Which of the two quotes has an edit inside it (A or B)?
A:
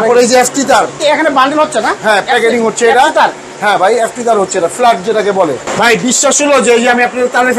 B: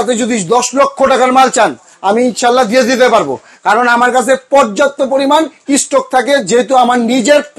A